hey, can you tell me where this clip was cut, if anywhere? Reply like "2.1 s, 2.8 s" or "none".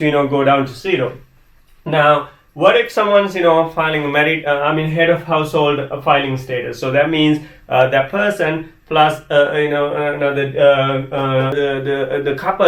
11.5 s

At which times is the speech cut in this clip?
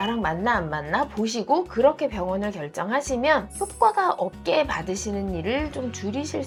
none

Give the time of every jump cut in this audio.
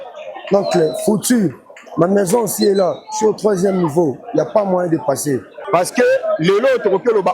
5.5 s

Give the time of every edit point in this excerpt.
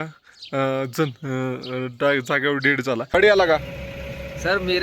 3.2 s

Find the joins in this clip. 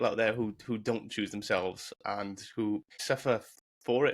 3.0 s

